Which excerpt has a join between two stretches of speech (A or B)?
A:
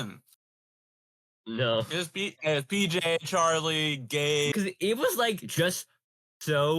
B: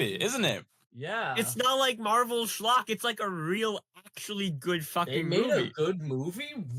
A